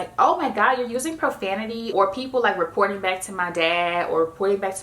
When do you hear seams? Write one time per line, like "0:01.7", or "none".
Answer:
0:01.9